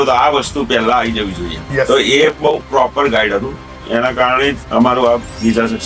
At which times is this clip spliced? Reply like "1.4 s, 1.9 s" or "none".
1.5 s, 4.6 s